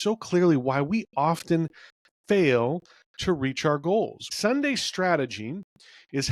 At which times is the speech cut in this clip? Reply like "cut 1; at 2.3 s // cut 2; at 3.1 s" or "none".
cut 1; at 4.3 s

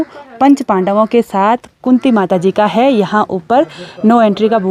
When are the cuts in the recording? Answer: none

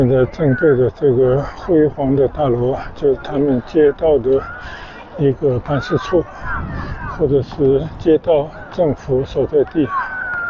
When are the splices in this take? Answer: none

